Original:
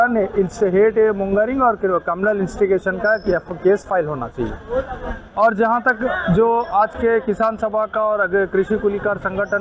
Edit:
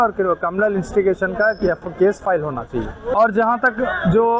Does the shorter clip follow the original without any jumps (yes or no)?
no